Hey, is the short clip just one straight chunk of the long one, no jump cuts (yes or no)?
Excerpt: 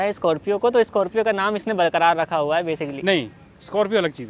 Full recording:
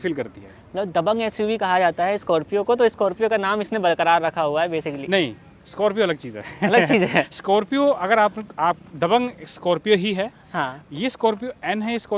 yes